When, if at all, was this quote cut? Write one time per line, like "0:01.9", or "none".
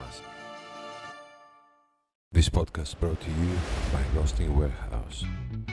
0:02.2

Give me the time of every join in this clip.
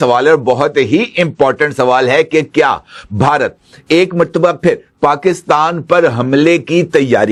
none

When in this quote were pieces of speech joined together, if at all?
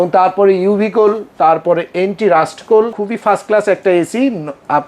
0:03.0

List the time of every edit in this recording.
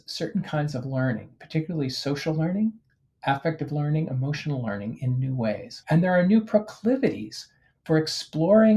0:05.7

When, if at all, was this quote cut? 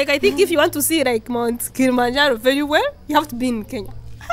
none

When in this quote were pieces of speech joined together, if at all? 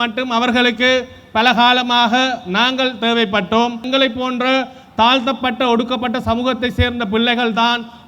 0:03.8

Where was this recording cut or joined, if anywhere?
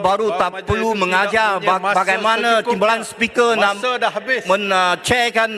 none

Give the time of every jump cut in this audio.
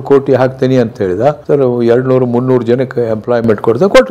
none

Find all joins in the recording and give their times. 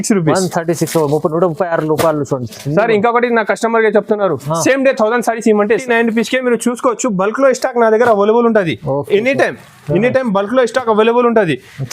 0:05.8

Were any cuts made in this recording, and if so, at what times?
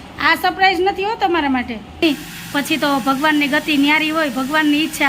0:02.0

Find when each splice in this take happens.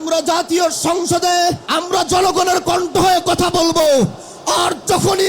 0:01.6

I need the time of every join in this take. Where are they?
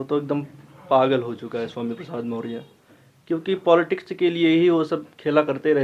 none

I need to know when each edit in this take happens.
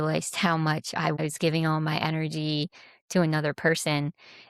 0:01.2

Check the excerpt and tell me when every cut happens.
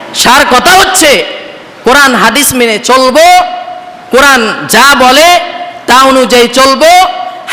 none

